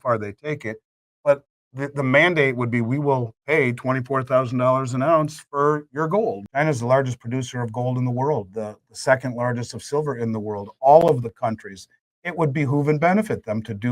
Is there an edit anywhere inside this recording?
yes; 1 cut; at 6.4 s

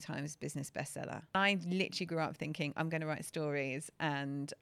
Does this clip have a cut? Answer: yes; 1 cut; at 1.3 s

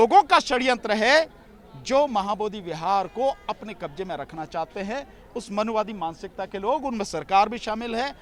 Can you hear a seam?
no; 0 cuts

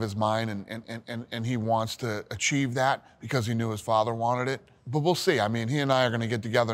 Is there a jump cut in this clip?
yes; 1 cut; at 4.7 s

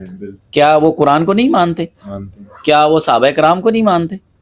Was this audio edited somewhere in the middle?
no; 0 cuts

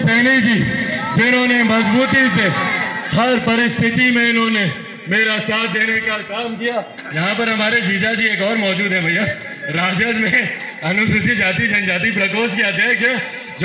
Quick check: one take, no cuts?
no; 1 cut; at 7.0 s

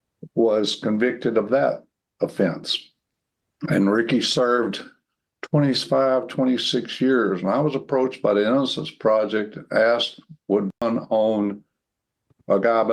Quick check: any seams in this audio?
yes; 1 cut; at 10.8 s

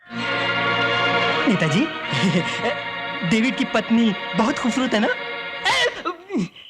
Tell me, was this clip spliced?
yes; 1 cut; at 1.4 s

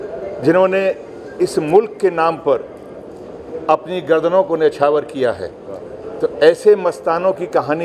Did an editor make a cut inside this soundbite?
no; 0 cuts

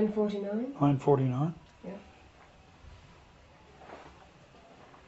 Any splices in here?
no; 0 cuts

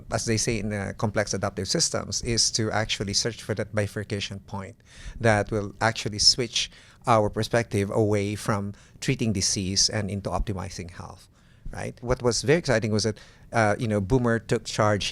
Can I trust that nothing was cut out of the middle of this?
yes; 0 cuts

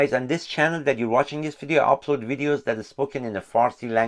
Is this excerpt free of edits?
yes; 0 cuts

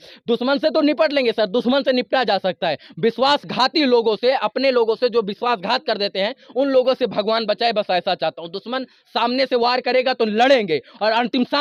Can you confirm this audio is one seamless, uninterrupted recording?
yes; 0 cuts

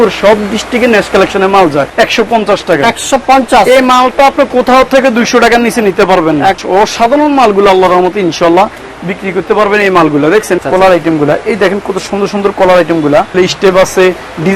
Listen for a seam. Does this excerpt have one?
yes; 4 cuts; at 1.9 s, 6.6 s, 10.6 s, 13.3 s

